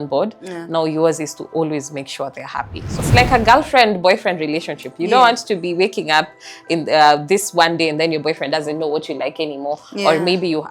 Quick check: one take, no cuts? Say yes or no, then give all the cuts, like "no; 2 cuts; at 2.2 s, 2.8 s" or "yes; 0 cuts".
no; 1 cut; at 3.0 s